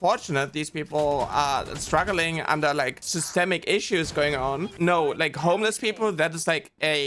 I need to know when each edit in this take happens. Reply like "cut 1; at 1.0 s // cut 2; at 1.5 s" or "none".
cut 1; at 3.1 s // cut 2; at 4.7 s